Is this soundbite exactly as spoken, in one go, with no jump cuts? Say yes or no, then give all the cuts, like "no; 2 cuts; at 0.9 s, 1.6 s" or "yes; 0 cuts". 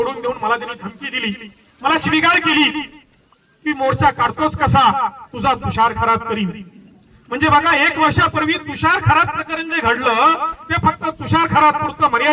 yes; 0 cuts